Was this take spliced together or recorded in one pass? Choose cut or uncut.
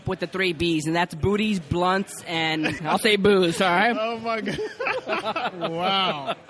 cut